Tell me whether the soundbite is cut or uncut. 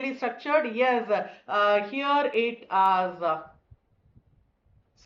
uncut